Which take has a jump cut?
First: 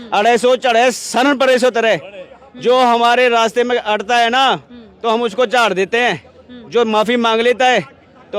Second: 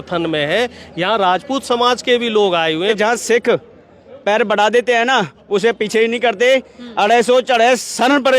second; 1 cut; at 2.9 s

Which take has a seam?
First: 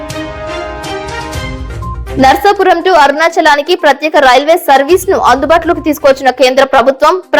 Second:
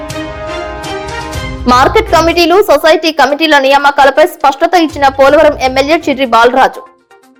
first; 1 cut; at 1.6 s

